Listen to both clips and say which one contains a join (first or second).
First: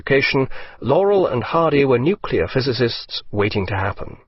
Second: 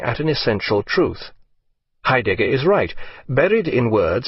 first